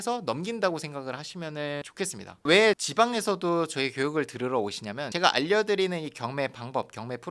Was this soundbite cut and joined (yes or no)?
yes